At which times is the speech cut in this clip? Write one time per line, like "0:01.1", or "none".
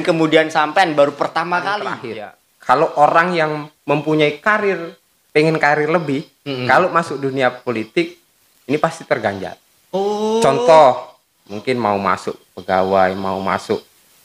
0:01.9